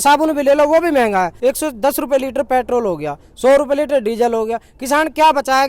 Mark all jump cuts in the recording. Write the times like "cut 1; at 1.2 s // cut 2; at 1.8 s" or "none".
cut 1; at 1.3 s